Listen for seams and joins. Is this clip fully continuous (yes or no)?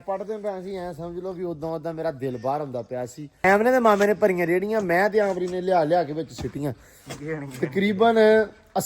no